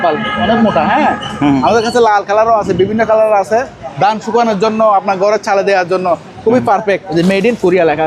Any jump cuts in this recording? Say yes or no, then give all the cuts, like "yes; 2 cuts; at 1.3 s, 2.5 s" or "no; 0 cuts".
yes; 2 cuts; at 3.8 s, 7.1 s